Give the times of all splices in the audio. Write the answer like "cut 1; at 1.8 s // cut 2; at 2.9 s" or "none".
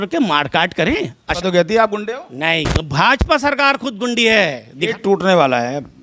cut 1; at 1.3 s // cut 2; at 4.8 s